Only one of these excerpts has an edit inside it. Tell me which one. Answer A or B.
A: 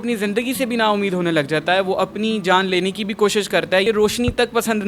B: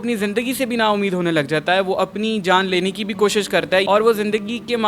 A